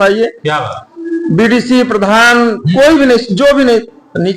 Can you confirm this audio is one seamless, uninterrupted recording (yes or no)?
yes